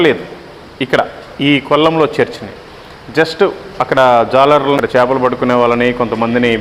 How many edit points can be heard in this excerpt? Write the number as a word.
one